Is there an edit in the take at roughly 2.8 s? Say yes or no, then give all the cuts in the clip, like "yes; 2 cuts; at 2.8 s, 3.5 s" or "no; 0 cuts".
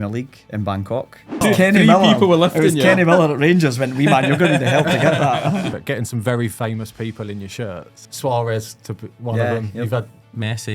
no; 3 cuts; at 1.4 s, 5.8 s, 8.0 s